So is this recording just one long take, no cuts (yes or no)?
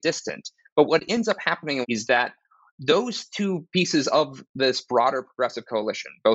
no